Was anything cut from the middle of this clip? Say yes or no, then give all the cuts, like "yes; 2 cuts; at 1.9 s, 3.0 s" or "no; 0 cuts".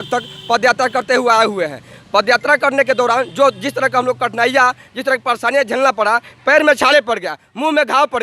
no; 0 cuts